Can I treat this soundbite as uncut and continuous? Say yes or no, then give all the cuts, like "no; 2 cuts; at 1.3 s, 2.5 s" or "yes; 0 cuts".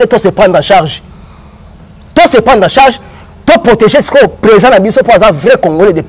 yes; 0 cuts